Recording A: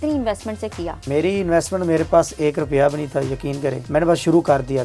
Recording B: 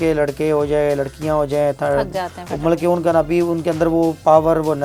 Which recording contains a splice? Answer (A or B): A